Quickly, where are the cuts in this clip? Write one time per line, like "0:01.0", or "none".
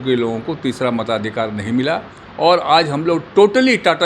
0:02.2